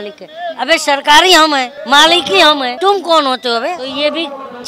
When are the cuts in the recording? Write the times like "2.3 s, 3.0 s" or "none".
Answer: 1.7 s, 2.7 s, 3.9 s